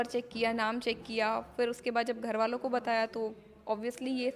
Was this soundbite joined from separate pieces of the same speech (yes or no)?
no